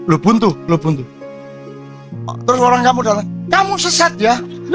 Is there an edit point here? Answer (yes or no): yes